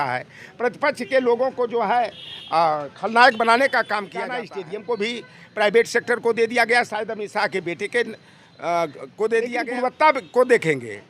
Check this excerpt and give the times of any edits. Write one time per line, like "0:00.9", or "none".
0:04.2
0:09.6